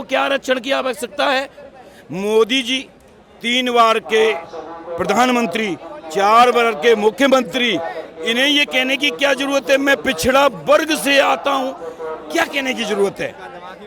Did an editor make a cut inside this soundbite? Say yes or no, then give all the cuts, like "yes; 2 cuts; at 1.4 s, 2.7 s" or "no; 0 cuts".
no; 0 cuts